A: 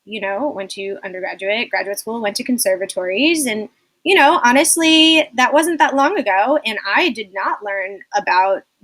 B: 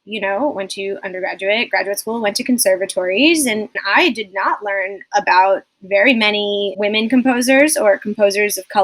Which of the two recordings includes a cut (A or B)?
B